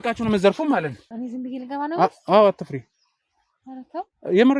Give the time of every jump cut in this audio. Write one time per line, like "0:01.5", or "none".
0:01.2